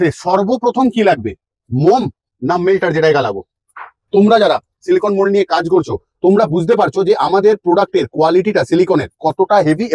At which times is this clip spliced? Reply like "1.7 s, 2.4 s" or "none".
4.1 s